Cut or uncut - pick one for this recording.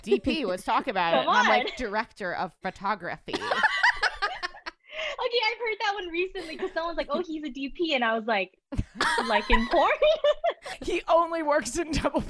cut